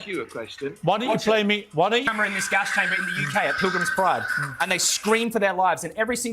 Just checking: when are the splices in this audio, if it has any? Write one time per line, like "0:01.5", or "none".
0:02.0